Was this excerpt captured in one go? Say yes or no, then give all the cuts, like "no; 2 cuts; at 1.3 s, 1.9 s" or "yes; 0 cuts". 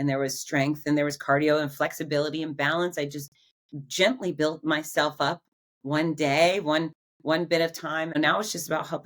no; 1 cut; at 8.2 s